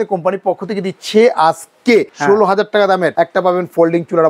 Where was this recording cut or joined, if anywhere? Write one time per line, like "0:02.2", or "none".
0:02.1
0:03.1